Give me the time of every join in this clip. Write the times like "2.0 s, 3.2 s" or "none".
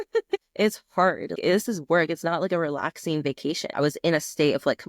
3.8 s

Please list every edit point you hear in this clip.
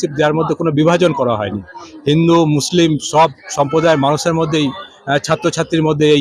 none

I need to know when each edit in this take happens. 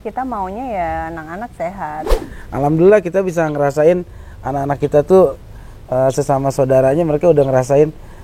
2.1 s

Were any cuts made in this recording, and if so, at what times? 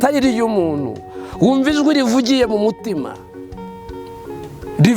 none

